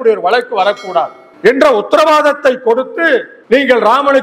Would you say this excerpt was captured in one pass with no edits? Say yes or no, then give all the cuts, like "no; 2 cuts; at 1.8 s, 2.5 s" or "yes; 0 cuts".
no; 2 cuts; at 1.2 s, 3.3 s